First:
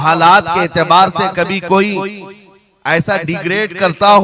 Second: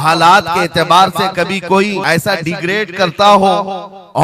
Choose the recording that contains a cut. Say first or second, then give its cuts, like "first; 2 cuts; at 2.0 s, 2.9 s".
second; 1 cut; at 2.0 s